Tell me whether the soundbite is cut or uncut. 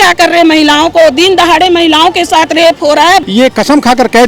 cut